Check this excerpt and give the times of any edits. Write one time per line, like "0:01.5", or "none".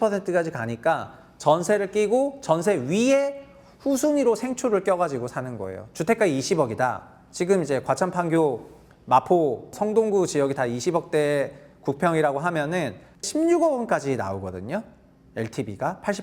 0:09.7
0:13.2